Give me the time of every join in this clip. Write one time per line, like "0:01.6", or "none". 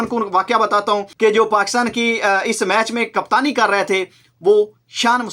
0:01.1